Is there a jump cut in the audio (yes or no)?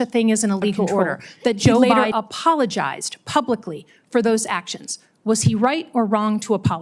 yes